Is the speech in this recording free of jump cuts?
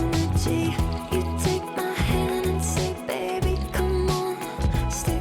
yes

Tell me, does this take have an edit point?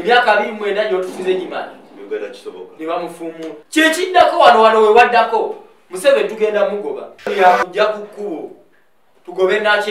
yes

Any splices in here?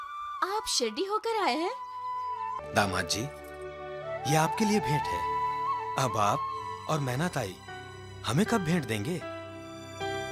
yes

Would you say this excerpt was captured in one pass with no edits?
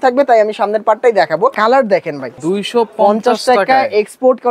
no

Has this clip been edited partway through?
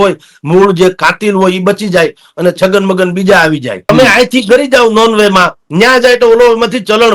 yes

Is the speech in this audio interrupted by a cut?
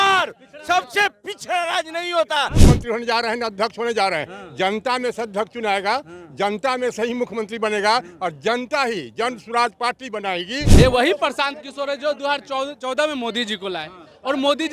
yes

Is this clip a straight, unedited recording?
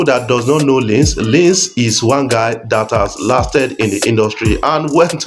yes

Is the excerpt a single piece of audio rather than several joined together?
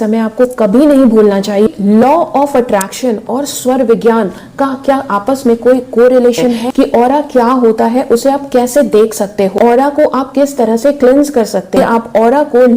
no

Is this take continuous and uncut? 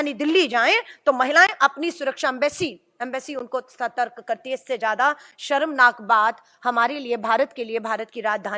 yes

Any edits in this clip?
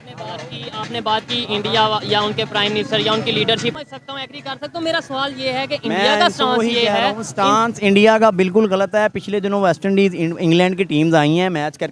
yes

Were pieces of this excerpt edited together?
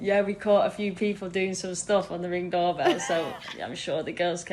no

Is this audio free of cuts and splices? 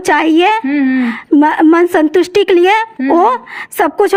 yes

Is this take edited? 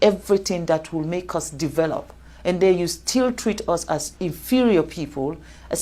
no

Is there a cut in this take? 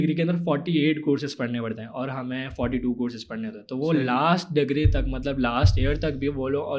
no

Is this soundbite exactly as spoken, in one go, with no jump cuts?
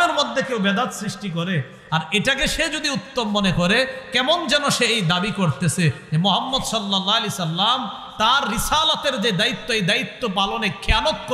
yes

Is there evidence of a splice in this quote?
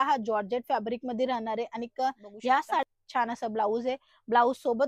yes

